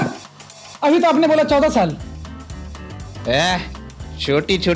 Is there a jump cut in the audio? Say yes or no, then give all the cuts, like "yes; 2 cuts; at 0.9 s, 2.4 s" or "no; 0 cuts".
no; 0 cuts